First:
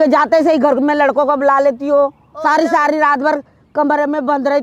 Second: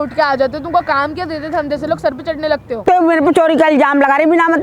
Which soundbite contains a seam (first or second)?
second